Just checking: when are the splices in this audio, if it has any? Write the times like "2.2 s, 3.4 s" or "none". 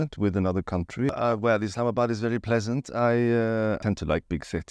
1.1 s, 3.8 s